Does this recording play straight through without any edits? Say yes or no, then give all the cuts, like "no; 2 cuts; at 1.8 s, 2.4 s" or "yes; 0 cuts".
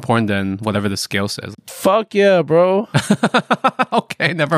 yes; 0 cuts